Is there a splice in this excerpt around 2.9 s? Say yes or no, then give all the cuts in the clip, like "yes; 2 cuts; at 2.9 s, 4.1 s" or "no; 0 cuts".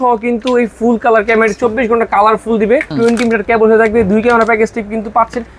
yes; 1 cut; at 2.9 s